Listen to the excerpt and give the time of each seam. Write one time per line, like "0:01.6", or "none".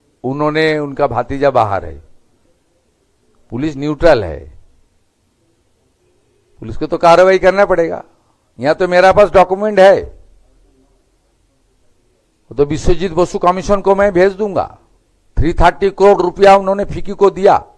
none